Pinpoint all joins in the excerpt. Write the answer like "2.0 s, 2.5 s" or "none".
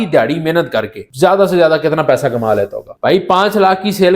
1.0 s, 2.8 s